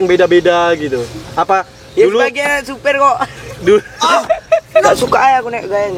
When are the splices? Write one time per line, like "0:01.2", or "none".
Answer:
0:04.8